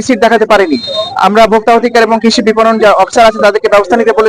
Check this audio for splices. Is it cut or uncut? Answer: uncut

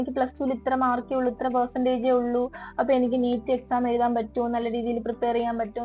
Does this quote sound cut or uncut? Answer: uncut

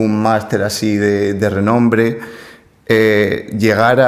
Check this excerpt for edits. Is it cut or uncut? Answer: uncut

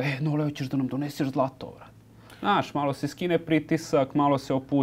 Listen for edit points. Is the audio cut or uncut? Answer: uncut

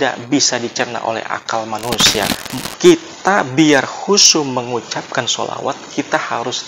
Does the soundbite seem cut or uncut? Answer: cut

